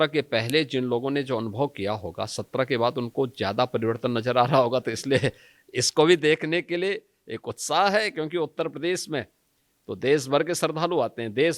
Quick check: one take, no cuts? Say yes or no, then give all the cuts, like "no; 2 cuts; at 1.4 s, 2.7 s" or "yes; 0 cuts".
yes; 0 cuts